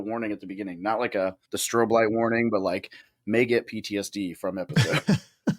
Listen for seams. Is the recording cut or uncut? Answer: cut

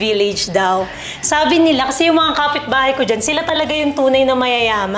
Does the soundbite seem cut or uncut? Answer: uncut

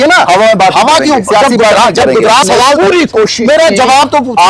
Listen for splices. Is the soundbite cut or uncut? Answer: cut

